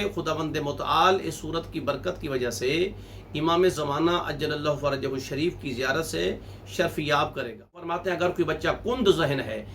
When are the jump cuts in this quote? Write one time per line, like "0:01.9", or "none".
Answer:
0:07.9